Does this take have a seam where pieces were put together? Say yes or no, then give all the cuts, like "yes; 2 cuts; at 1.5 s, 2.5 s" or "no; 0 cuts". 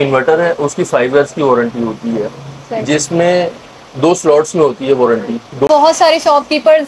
yes; 1 cut; at 5.7 s